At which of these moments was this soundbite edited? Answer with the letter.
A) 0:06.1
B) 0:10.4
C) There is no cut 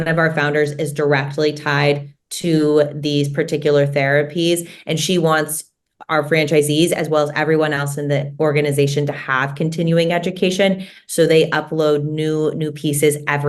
C